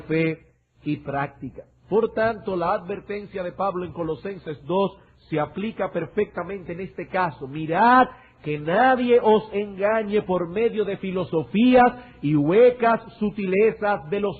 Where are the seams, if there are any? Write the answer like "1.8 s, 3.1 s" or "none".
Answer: none

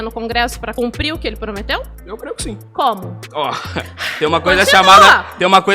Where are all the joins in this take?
0.7 s, 2.3 s, 3.2 s

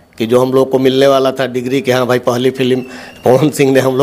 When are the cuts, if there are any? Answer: none

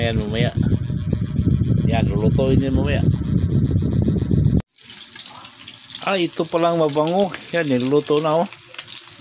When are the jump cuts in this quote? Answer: 4.6 s

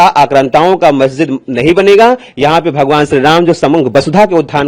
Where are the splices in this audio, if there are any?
none

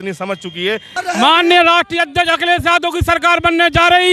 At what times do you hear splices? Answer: 0.9 s

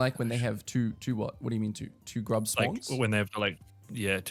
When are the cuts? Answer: none

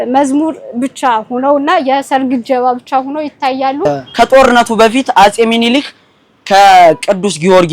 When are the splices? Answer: 3.9 s

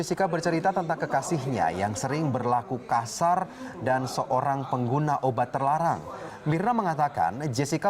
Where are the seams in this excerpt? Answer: 2.0 s

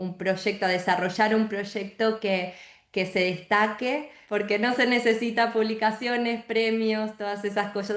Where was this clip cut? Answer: 4.1 s

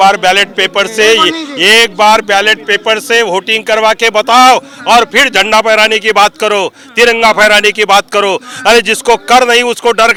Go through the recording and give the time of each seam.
none

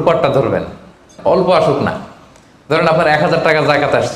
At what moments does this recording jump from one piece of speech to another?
1.1 s

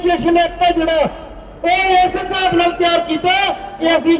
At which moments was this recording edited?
none

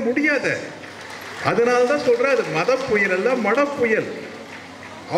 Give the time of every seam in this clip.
none

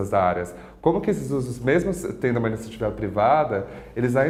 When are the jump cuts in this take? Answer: none

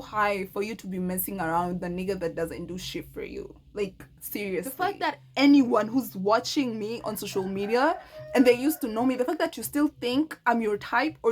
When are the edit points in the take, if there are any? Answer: 4.9 s

